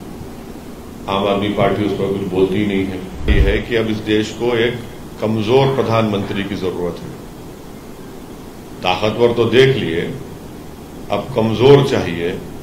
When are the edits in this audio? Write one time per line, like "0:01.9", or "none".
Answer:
0:03.3

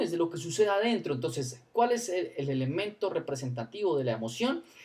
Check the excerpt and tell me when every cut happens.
0:01.5

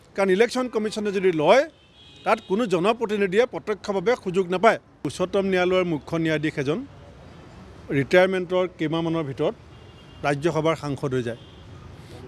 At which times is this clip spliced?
0:05.1

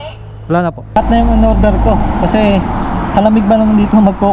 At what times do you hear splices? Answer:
0:00.9

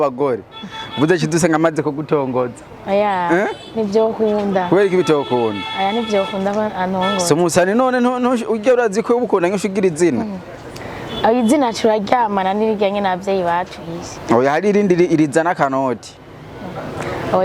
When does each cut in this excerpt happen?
none

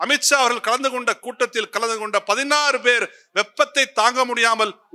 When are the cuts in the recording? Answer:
none

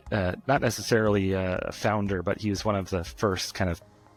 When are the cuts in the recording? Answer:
none

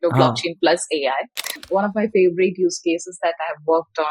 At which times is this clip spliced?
0:01.6

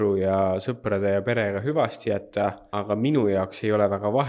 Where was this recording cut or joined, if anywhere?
0:02.7

